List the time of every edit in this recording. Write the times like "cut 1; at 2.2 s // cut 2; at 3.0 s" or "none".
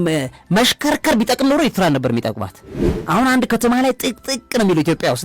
cut 1; at 2.9 s